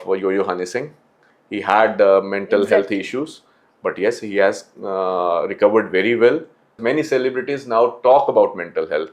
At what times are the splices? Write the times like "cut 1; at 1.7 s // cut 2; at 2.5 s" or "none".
cut 1; at 6.8 s